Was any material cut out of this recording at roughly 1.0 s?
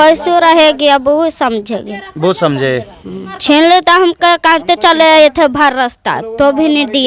no; 1 cut; at 3.3 s

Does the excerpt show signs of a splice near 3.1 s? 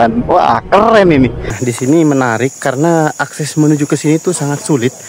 no; 1 cut; at 1.6 s

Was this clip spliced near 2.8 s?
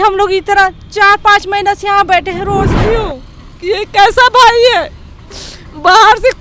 yes; 1 cut; at 2.8 s

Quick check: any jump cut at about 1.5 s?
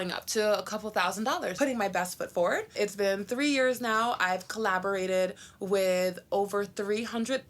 yes; 1 cut; at 1.5 s

